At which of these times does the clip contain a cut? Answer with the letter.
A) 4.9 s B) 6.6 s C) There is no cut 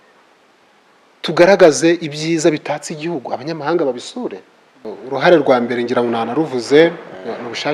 A